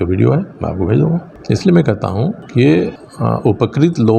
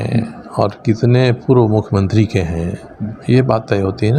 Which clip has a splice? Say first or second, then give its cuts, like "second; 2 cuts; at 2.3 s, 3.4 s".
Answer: first; 3 cuts; at 1.3 s, 2.4 s, 3.1 s